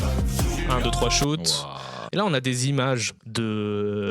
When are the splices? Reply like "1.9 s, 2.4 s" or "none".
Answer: 1.9 s